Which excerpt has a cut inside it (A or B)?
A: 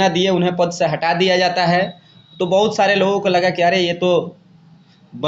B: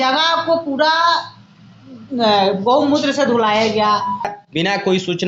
B